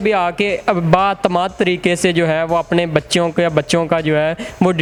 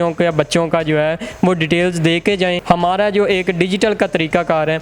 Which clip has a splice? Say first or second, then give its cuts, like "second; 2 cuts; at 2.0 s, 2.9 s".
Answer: second; 1 cut; at 2.6 s